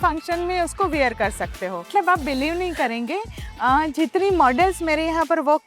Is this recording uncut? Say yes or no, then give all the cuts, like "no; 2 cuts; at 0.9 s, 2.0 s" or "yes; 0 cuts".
no; 1 cut; at 1.9 s